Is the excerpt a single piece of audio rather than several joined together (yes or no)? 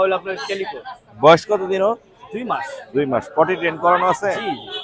yes